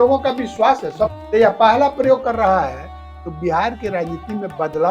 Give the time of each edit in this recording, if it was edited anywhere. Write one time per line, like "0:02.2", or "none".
0:01.2